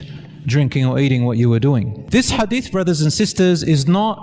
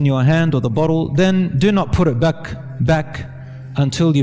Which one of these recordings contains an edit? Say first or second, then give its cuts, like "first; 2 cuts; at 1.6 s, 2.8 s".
first; 1 cut; at 2.0 s